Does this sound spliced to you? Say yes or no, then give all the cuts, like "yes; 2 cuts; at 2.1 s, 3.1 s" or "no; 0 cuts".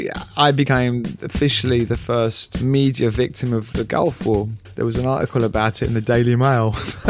yes; 2 cuts; at 2.5 s, 4.6 s